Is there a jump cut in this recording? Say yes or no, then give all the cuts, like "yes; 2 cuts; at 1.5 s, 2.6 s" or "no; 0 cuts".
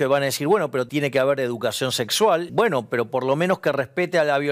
yes; 2 cuts; at 0.9 s, 2.5 s